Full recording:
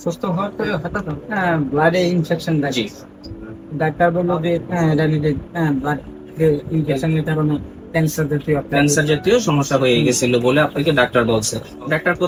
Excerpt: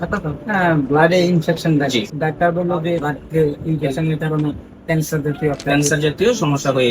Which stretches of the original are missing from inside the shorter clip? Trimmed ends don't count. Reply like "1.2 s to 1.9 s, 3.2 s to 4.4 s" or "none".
2.9 s to 3.7 s, 4.7 s to 6.1 s

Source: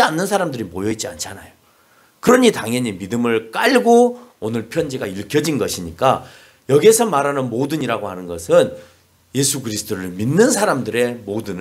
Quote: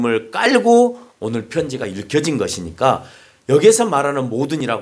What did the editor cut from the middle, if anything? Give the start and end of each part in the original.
none

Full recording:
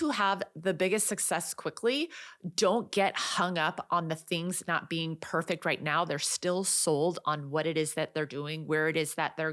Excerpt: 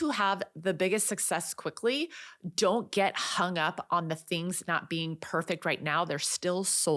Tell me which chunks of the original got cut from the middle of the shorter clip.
none

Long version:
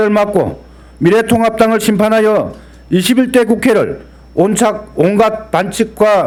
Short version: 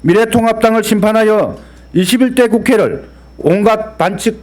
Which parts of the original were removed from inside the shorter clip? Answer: 4.3 s to 4.8 s

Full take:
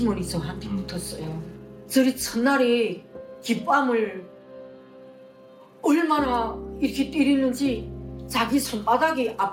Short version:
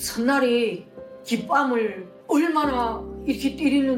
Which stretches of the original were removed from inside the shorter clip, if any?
4.3 s to 5.6 s

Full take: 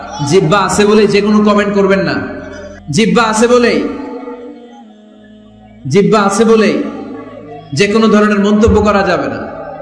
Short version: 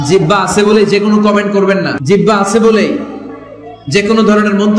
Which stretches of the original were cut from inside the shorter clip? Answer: 2.2 s to 5.8 s

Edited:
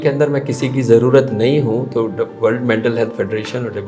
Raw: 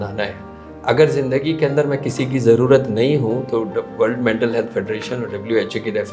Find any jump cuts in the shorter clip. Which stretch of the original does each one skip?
none

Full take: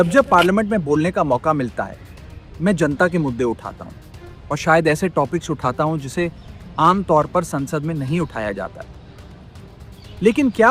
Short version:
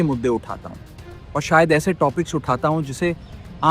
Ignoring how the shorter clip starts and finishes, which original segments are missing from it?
none

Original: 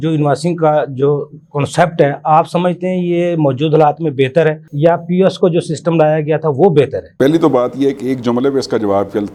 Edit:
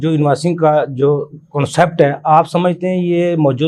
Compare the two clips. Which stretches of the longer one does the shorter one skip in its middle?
none

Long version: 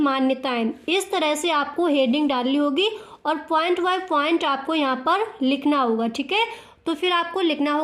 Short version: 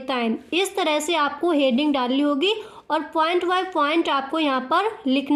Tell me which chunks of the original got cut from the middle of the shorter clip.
none

